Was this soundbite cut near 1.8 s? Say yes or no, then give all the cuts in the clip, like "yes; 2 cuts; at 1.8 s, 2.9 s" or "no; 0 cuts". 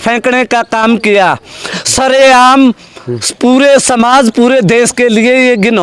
yes; 1 cut; at 1.8 s